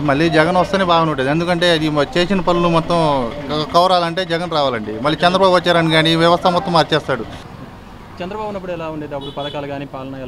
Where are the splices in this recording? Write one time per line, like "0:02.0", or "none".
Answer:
0:07.4